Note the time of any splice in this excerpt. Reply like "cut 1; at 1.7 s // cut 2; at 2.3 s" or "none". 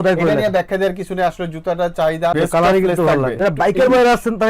cut 1; at 2.3 s // cut 2; at 3.4 s